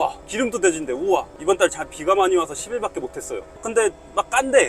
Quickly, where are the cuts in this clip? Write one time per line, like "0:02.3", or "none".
0:01.3
0:03.6